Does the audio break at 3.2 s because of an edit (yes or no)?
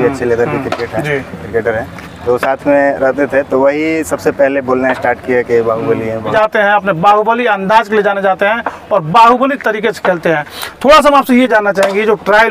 no